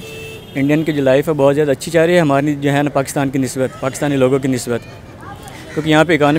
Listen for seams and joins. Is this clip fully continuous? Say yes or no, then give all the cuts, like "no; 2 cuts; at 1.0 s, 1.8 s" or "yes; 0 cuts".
yes; 0 cuts